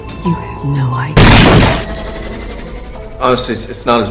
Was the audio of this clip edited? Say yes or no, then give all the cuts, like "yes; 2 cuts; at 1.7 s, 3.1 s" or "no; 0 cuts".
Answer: yes; 1 cut; at 1.2 s